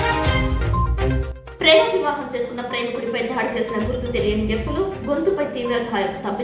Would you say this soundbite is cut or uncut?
cut